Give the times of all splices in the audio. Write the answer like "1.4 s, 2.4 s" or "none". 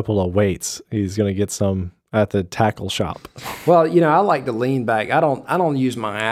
none